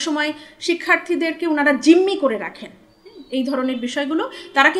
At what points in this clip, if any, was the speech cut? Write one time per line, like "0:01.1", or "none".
none